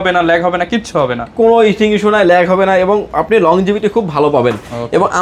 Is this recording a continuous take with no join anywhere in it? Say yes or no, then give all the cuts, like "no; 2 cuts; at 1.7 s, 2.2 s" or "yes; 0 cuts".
yes; 0 cuts